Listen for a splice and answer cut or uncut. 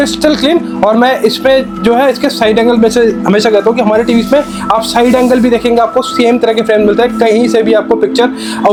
uncut